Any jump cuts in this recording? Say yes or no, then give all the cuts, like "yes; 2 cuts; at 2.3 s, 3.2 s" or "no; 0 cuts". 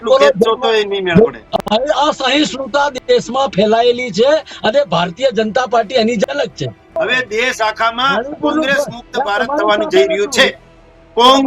yes; 2 cuts; at 1.4 s, 7.0 s